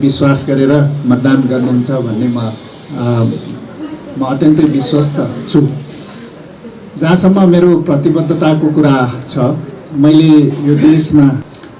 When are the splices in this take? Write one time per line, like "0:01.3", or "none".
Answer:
none